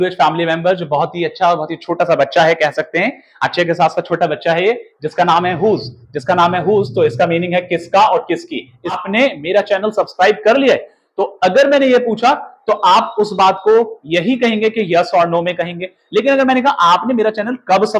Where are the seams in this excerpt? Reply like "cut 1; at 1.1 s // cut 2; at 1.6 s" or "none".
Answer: cut 1; at 9.0 s